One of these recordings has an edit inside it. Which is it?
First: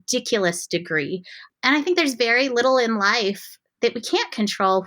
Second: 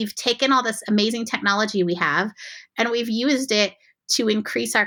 first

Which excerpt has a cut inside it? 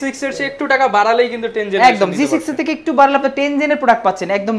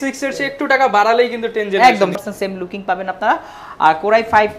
second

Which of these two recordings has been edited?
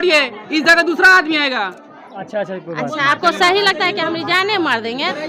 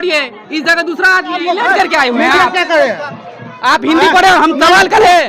second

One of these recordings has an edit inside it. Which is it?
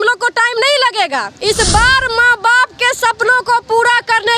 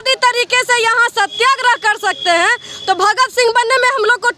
first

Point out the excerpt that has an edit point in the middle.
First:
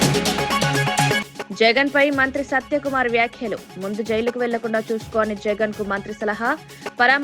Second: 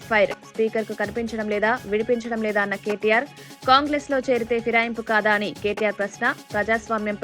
first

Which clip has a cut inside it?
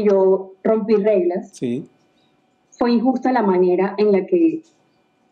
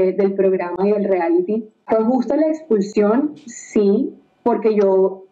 second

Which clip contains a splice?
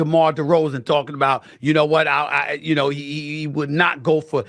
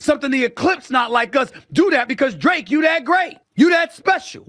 second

